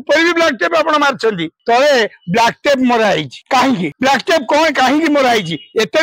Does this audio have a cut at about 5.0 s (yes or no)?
no